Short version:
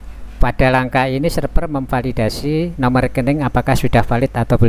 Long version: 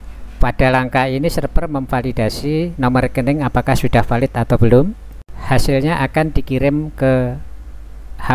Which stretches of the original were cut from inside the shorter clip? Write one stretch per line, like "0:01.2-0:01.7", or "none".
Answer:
none